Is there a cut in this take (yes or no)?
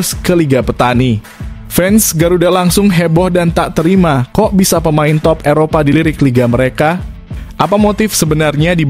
no